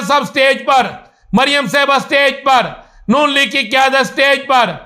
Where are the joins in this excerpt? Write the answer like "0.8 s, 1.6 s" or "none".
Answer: none